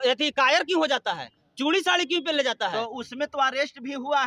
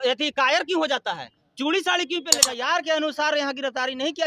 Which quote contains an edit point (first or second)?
second